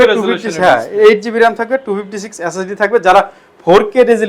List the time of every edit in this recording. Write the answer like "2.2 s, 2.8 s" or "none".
none